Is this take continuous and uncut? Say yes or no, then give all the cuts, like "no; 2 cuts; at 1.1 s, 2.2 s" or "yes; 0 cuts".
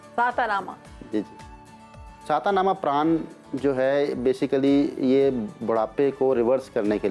yes; 0 cuts